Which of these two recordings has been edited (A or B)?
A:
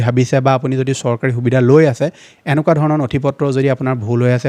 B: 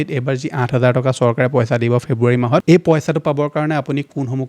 B